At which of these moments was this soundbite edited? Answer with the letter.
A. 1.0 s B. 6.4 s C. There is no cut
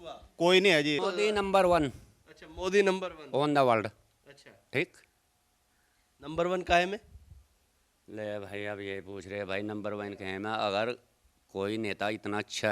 A